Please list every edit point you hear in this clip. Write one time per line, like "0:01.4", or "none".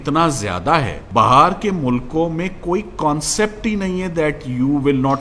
0:01.0